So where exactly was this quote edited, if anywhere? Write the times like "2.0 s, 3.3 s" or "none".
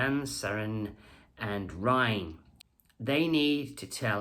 none